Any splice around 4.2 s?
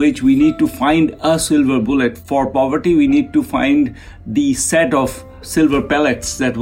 no; 2 cuts; at 2.2 s, 5.4 s

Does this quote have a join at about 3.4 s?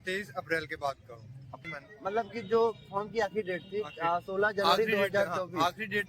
no; 1 cut; at 1.7 s

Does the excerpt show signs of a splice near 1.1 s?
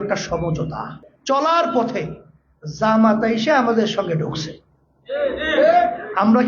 yes; 1 cut; at 1.1 s

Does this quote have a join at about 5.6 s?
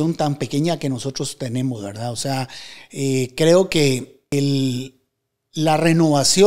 no; 1 cut; at 4.3 s

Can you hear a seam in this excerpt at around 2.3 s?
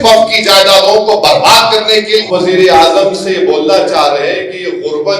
yes; 1 cut; at 2.3 s

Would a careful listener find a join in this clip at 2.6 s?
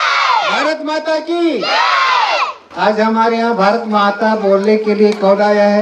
no; 0 cuts

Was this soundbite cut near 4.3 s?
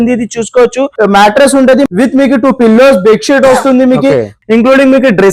yes; 3 cuts; at 0.9 s, 1.9 s, 4.3 s

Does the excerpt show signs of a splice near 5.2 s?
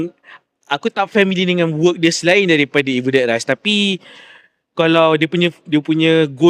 no; 0 cuts

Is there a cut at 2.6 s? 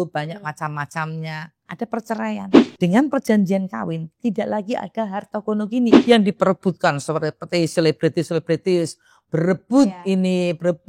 yes; 2 cuts; at 2.6 s, 6.0 s

